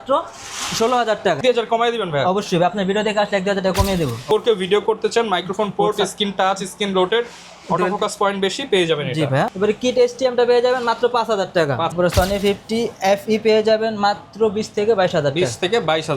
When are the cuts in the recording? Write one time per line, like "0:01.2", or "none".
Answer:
0:01.4
0:04.2
0:09.5
0:11.9